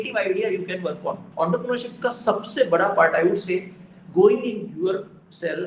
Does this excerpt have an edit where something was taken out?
yes; 1 cut; at 1.2 s

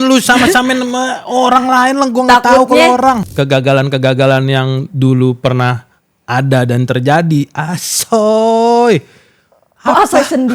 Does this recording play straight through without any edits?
no; 1 cut; at 3.3 s

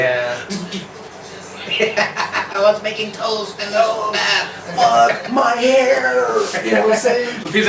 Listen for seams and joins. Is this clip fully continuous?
yes; 0 cuts

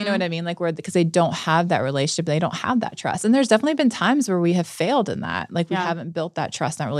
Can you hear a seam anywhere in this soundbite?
no; 0 cuts

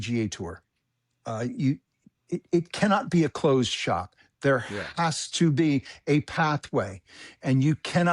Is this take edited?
no; 0 cuts

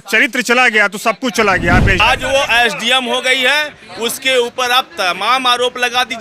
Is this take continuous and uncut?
no; 1 cut; at 2.0 s

